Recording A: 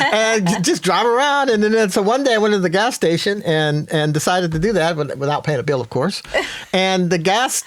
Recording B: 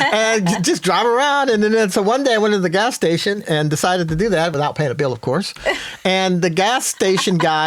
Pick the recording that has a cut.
B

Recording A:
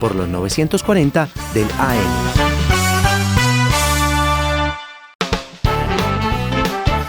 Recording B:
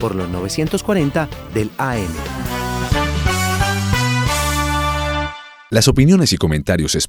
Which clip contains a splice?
A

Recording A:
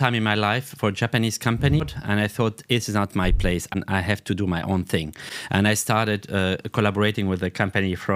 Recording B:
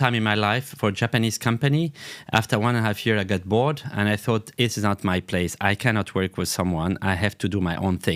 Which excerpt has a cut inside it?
A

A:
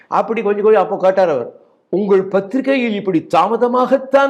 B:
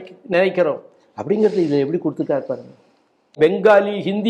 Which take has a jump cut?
B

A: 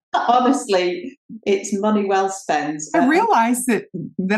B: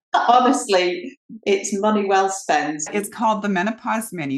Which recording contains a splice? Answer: B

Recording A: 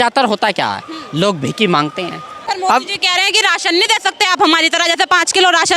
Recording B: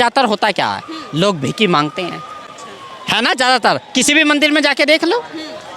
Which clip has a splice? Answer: A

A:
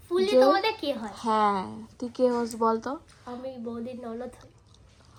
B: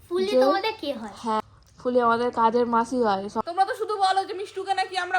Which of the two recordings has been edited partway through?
B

